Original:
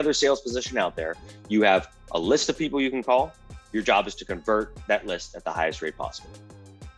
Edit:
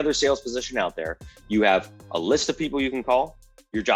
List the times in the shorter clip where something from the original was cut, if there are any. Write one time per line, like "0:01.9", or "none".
none